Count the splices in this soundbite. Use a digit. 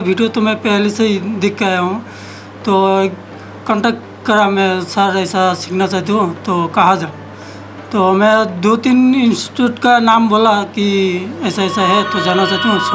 0